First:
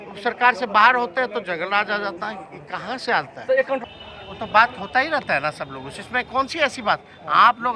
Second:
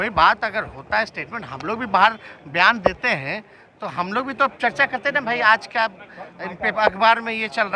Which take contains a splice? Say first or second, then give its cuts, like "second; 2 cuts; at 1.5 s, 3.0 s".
first; 1 cut; at 3.8 s